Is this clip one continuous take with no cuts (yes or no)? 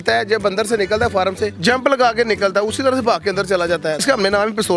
no